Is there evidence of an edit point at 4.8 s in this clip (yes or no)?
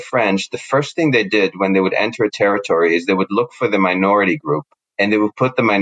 yes